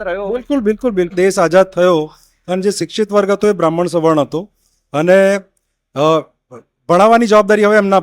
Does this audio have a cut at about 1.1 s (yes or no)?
yes